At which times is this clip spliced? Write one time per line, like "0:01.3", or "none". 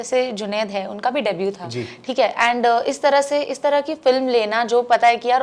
none